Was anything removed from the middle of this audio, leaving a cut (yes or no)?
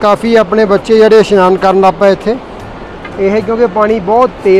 no